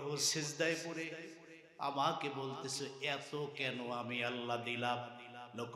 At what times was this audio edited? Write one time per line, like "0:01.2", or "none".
none